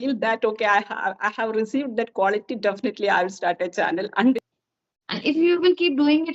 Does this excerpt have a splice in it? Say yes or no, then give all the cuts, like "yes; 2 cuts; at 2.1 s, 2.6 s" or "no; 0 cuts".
yes; 1 cut; at 4.4 s